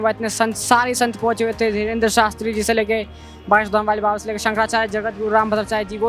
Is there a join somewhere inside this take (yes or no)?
no